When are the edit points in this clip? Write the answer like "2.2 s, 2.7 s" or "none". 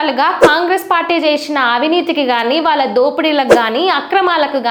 none